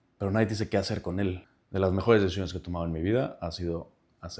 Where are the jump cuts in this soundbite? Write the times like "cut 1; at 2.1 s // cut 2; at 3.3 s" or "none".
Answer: cut 1; at 1.5 s